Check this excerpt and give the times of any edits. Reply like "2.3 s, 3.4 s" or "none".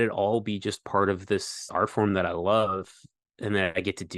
1.6 s